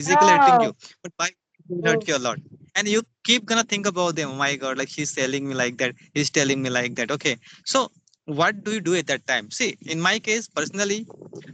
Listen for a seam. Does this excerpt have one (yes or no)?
no